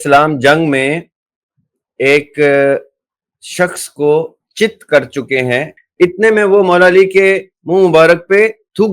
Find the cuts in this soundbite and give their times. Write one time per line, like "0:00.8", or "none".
0:05.8